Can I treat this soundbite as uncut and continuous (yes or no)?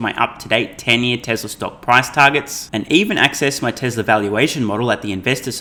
yes